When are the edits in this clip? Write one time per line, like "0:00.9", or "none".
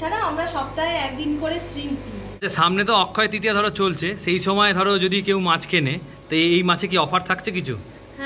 0:02.3